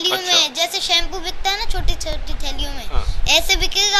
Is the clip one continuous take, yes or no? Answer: yes